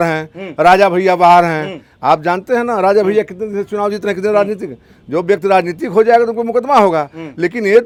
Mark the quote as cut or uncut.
uncut